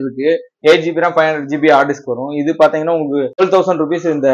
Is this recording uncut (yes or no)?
no